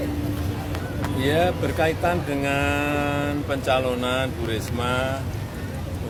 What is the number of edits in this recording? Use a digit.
0